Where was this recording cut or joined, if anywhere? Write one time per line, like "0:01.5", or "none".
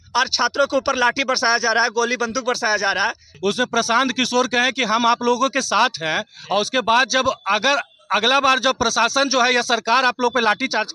0:03.2